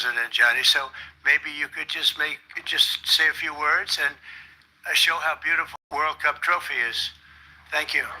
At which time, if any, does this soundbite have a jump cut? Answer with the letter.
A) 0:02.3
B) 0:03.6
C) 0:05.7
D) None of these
C